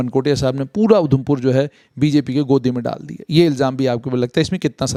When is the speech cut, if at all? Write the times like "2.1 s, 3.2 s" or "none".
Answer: none